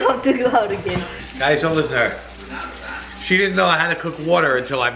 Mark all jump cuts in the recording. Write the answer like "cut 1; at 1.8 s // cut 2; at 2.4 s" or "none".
cut 1; at 1.2 s